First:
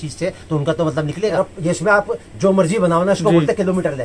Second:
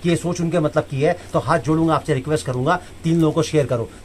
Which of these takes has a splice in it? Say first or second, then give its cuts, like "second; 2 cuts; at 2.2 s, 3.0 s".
first; 1 cut; at 1.4 s